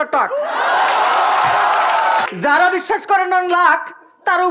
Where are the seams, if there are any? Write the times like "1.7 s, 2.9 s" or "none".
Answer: 2.3 s